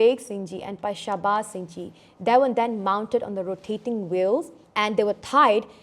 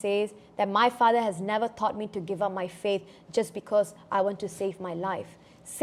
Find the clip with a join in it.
first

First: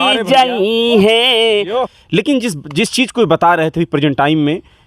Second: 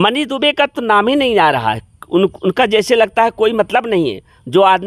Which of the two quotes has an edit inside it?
first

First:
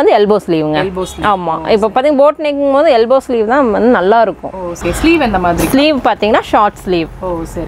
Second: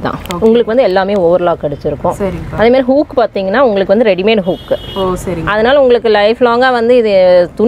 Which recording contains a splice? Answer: first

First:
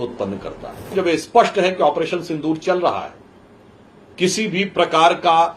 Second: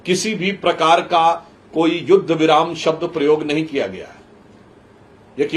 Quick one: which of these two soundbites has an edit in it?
first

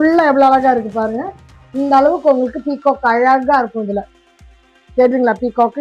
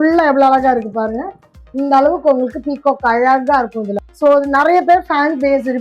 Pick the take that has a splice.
second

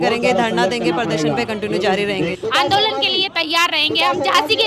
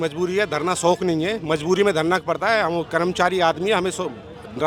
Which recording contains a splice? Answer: first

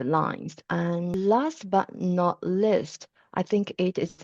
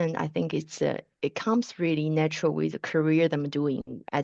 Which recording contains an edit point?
first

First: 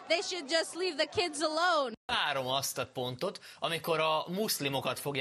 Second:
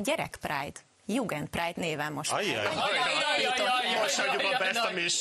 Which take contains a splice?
first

